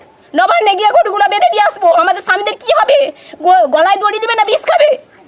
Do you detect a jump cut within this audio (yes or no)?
no